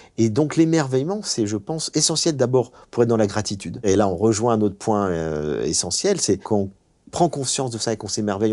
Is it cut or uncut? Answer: cut